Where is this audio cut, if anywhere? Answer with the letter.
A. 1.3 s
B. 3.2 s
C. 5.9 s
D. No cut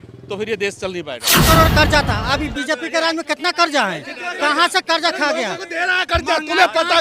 A